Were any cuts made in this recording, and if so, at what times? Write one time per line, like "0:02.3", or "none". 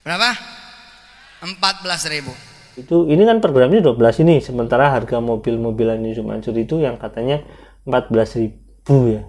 0:02.9